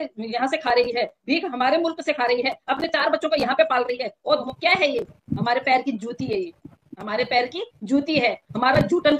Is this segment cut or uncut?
cut